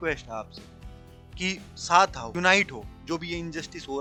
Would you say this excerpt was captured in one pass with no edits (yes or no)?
yes